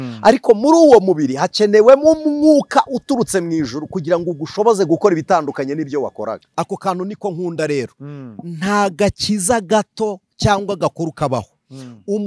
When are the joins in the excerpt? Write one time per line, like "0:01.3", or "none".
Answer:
0:06.4